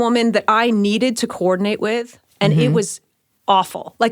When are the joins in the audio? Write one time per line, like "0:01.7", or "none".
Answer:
none